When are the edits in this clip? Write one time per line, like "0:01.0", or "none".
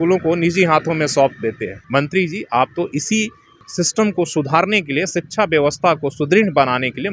0:01.7
0:03.6